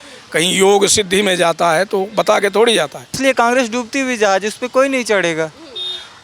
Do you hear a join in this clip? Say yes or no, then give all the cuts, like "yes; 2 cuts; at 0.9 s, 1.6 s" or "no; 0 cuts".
yes; 1 cut; at 3.2 s